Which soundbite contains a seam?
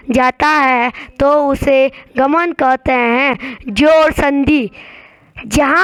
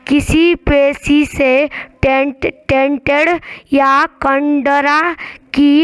second; 1 cut; at 1.0 s

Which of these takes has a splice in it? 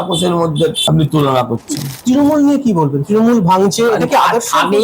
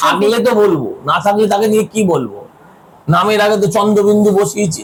first; 2 cuts; at 0.8 s, 1.9 s

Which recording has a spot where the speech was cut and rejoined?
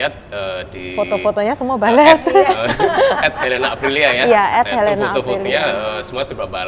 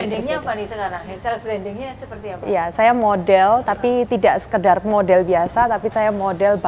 second; 1 cut; at 1.1 s

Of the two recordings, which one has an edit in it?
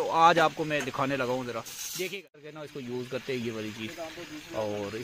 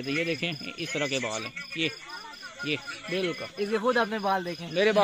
first; 1 cut; at 2.7 s

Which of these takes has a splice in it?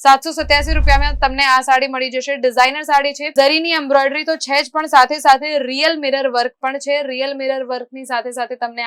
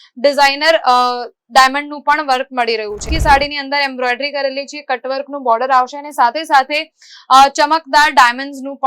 second; 1 cut; at 3.1 s

